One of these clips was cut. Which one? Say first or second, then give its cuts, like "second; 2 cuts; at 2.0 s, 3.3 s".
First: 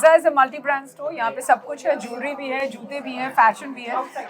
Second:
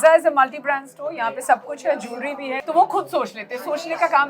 second; 1 cut; at 2.5 s